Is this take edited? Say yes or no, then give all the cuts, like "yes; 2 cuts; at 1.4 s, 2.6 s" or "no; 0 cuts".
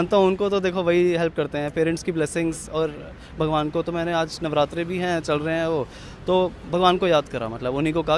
no; 0 cuts